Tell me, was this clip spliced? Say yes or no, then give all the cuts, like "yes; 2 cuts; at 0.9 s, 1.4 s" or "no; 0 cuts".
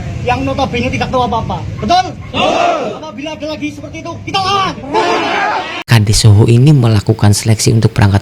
yes; 1 cut; at 5.8 s